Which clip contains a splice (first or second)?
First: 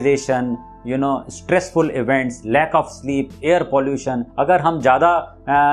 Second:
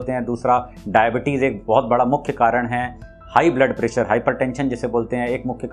first